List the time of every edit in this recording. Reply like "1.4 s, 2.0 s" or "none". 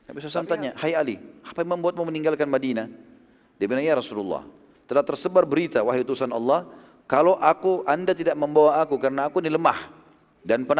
none